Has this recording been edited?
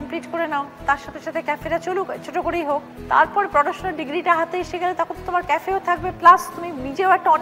no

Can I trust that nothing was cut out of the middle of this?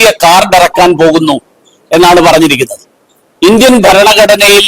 no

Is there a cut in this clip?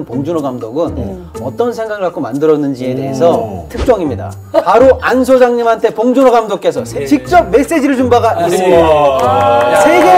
no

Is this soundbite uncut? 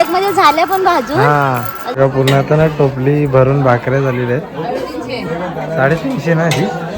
no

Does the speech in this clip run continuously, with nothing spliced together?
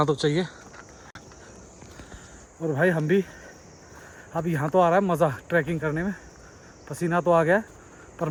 yes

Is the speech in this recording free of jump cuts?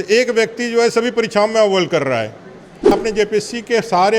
no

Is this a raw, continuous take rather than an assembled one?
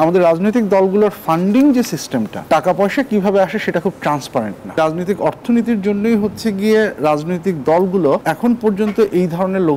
no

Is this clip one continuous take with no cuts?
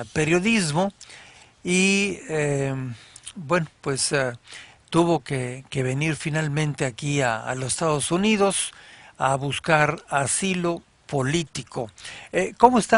no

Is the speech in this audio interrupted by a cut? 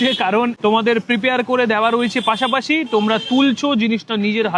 no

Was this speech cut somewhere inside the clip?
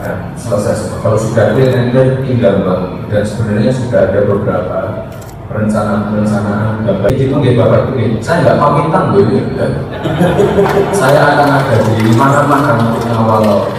yes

